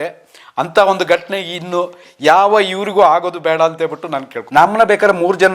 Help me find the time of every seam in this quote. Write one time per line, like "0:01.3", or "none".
0:04.3